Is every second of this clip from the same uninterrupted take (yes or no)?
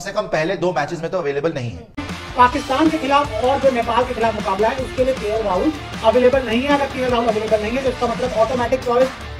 no